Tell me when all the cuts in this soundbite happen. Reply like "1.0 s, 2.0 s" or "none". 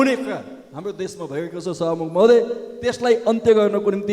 none